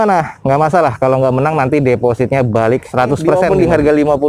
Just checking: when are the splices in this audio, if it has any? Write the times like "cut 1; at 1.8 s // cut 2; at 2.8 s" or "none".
cut 1; at 3.3 s